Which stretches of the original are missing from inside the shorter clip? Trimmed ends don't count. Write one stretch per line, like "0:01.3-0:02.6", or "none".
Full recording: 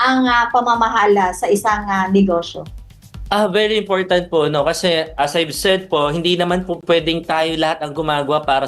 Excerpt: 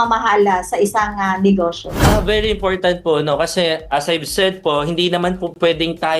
0:02.6-0:03.2